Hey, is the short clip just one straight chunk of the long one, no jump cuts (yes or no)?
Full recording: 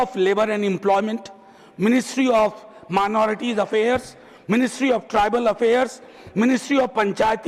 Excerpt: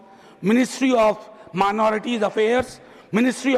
yes